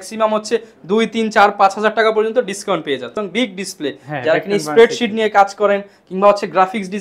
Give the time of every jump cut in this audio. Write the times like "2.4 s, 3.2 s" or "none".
3.2 s